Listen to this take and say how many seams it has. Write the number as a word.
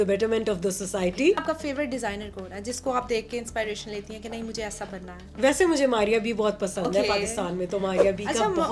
one